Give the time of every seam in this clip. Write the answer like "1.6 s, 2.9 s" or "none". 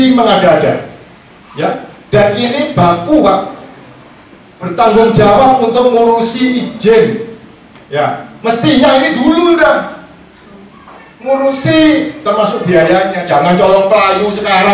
none